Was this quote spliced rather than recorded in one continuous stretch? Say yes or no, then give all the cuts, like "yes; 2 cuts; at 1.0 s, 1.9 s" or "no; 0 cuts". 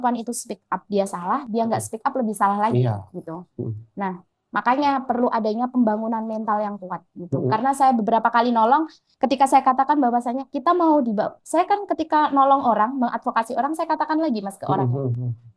no; 0 cuts